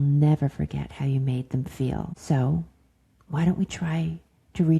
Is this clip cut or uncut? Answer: cut